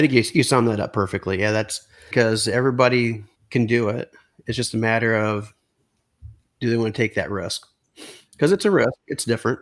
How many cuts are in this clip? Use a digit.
1